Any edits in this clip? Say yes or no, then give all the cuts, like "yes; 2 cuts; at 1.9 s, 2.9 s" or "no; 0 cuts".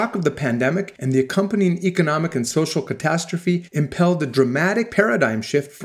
yes; 3 cuts; at 0.9 s, 3.7 s, 4.9 s